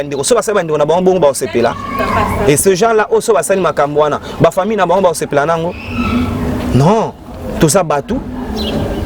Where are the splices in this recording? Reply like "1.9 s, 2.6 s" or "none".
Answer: none